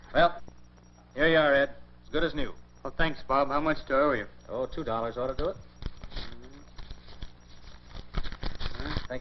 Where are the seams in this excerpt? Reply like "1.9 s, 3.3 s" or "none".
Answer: none